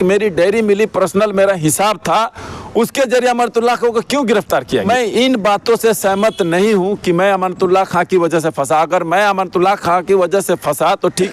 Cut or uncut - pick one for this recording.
cut